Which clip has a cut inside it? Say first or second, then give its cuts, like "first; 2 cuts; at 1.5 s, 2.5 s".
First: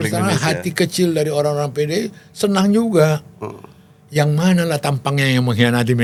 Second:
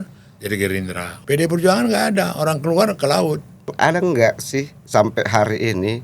second; 2 cuts; at 1.1 s, 3.7 s